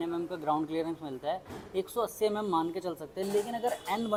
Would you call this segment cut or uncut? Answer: uncut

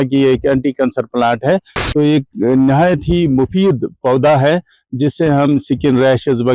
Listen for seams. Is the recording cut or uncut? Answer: cut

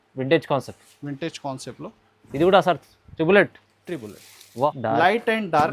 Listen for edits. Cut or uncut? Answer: cut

